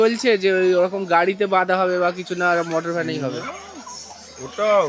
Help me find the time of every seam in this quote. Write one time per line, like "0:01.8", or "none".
none